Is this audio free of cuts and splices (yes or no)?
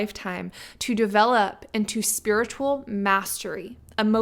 yes